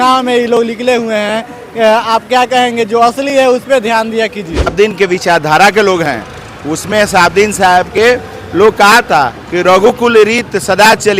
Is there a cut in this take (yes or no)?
yes